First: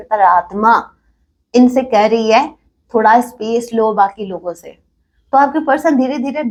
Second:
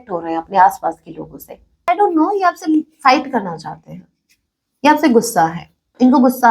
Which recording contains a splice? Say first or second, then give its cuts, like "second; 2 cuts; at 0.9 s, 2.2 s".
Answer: second; 1 cut; at 1.9 s